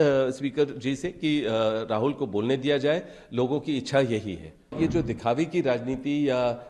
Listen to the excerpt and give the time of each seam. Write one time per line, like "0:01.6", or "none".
0:04.8

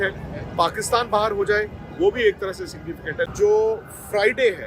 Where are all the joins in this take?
0:03.3

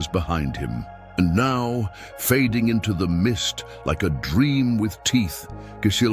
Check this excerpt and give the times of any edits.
none

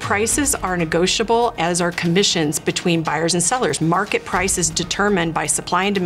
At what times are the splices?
none

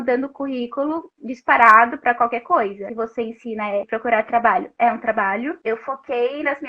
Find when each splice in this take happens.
0:02.8
0:03.9
0:05.6

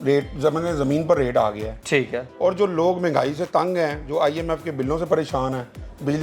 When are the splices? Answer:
none

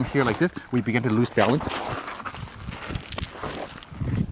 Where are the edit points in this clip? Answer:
none

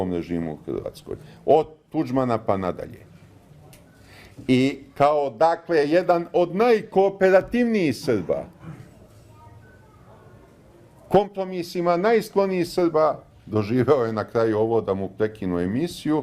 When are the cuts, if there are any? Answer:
0:04.3

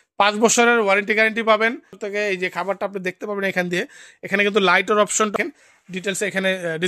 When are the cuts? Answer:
0:02.0
0:05.3

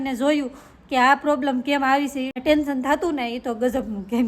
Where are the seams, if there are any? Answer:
0:02.4

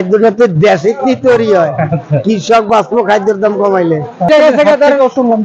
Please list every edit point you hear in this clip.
0:04.3

